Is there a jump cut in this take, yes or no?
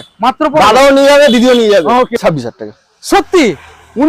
yes